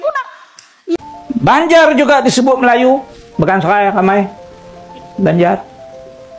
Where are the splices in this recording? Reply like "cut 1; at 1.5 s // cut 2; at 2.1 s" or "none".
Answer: cut 1; at 1.0 s